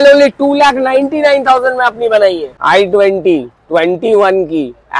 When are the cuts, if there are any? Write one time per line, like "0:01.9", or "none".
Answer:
0:02.5